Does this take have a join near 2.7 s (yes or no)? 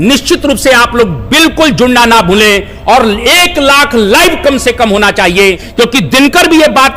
no